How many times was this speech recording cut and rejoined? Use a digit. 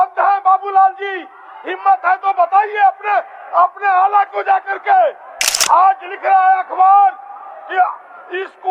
0